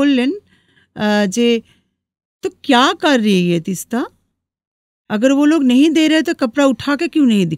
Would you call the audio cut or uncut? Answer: uncut